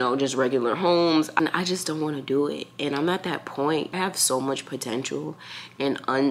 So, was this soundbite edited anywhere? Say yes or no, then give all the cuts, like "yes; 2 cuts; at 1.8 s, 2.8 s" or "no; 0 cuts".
yes; 2 cuts; at 1.3 s, 3.9 s